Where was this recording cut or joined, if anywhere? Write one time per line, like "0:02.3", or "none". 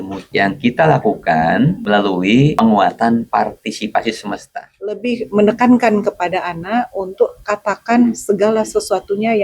0:02.1
0:05.0